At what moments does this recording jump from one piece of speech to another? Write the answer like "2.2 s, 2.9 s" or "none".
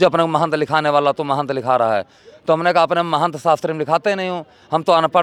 none